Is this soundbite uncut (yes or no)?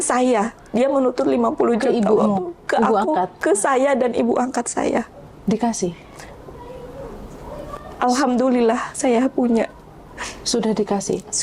yes